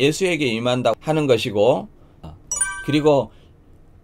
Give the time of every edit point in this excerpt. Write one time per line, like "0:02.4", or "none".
0:02.3